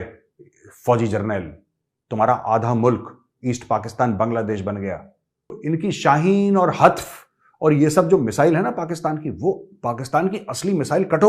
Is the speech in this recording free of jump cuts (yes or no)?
no